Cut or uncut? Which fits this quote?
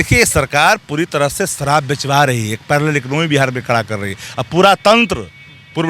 uncut